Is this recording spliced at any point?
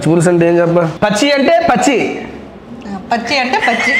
yes; 1 cut; at 0.9 s

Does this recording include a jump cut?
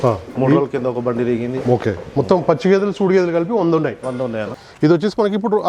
yes; 1 cut; at 4.5 s

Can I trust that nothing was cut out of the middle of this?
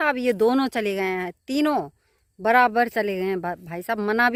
yes; 0 cuts

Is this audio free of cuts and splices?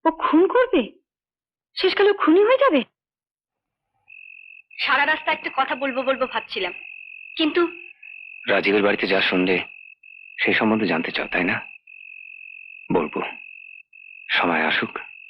yes; 0 cuts

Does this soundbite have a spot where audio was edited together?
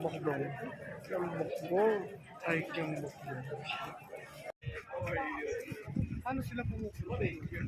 yes; 1 cut; at 4.6 s

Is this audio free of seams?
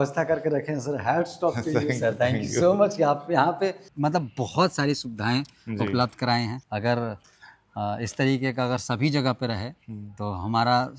no; 1 cut; at 3.9 s

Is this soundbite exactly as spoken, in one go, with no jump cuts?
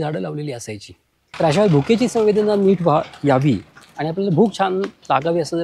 no; 1 cut; at 1.2 s

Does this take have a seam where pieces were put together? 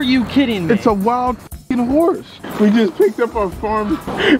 yes; 1 cut; at 2.3 s

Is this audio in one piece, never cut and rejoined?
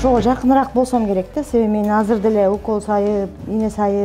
yes; 0 cuts

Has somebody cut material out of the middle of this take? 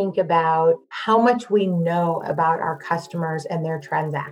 yes; 1 cut; at 0.9 s

